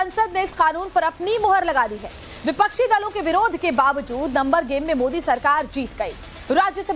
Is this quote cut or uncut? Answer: cut